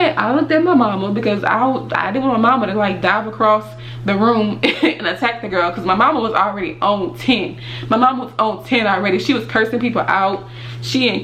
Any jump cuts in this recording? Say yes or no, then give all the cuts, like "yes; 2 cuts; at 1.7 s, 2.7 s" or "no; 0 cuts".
no; 0 cuts